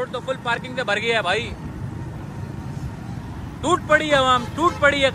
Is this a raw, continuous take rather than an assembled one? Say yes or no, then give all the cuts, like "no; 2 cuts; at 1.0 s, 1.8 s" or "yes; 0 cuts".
yes; 0 cuts